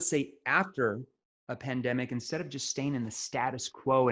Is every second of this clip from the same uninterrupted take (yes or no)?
yes